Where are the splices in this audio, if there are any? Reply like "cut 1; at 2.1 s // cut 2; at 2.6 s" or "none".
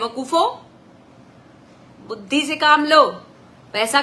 none

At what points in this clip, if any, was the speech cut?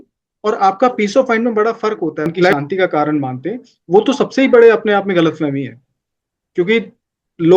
cut 1; at 2.5 s

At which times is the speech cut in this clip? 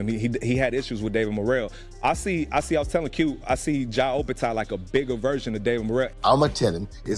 cut 1; at 6.1 s

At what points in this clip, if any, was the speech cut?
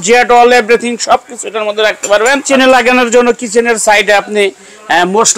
cut 1; at 2.5 s

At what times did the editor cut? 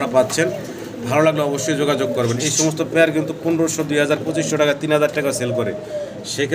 none

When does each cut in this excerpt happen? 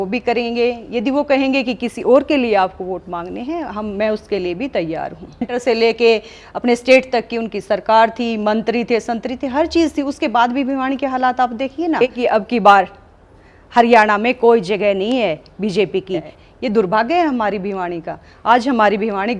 cut 1; at 5.5 s // cut 2; at 12.0 s // cut 3; at 16.3 s

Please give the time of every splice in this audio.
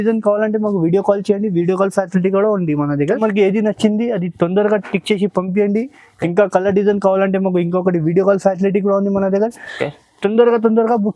cut 1; at 3.2 s

